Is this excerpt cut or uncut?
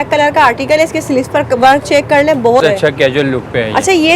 cut